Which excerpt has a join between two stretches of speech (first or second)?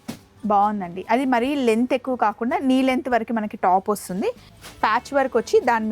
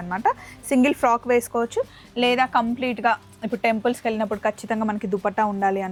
first